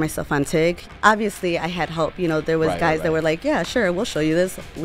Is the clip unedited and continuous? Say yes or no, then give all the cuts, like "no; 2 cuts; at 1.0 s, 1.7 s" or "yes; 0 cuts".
no; 1 cut; at 0.9 s